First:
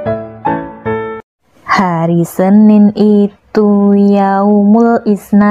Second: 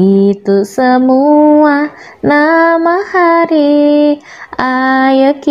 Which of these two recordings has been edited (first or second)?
first